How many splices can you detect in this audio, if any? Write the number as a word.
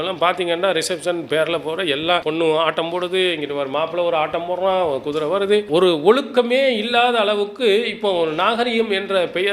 one